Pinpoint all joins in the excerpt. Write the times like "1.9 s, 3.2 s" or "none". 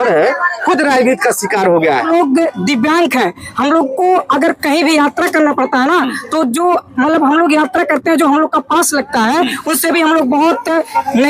2.1 s

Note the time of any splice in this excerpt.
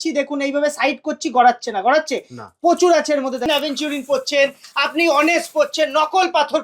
3.5 s

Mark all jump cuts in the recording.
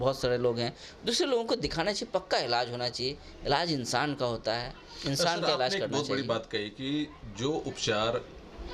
none

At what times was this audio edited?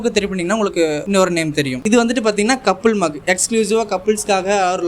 1.0 s, 1.8 s

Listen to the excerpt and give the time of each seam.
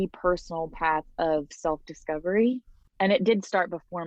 2.8 s

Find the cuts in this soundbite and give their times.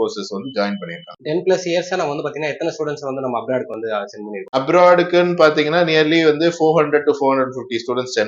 1.2 s, 4.6 s

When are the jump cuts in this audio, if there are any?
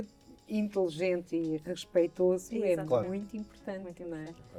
none

